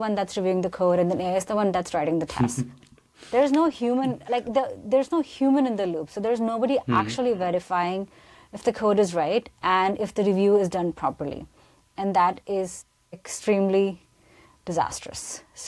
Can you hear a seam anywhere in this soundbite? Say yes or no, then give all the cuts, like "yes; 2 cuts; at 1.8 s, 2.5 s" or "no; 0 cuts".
no; 0 cuts